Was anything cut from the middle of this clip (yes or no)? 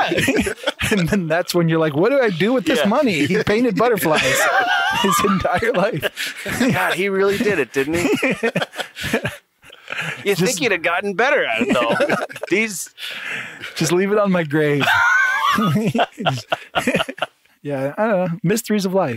yes